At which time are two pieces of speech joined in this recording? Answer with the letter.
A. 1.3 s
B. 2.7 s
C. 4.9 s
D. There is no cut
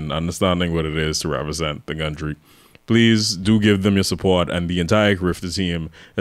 D